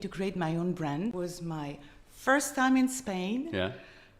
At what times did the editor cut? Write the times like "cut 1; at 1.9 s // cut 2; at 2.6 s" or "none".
cut 1; at 1.1 s

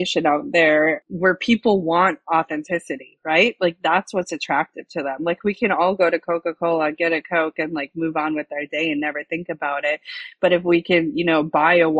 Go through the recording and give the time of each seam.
cut 1; at 1.0 s

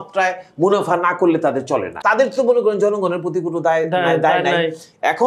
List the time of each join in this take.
cut 1; at 1.9 s

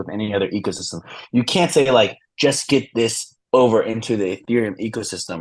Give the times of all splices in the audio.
none

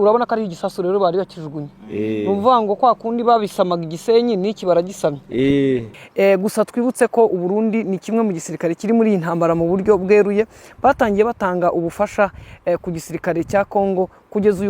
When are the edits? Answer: cut 1; at 6.0 s

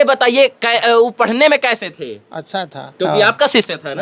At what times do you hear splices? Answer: cut 1; at 2.9 s

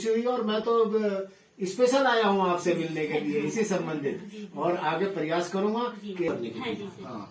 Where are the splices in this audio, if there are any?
cut 1; at 6.3 s

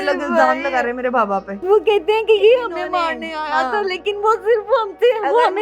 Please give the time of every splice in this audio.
cut 1; at 1.5 s

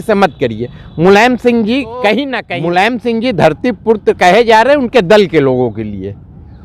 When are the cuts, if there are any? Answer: cut 1; at 2.4 s

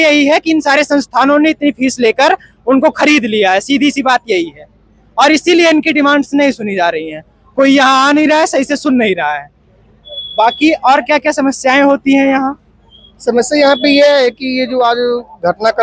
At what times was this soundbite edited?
none

